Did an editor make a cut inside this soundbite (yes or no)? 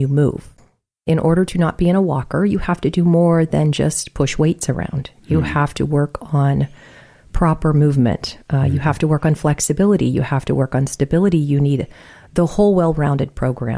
yes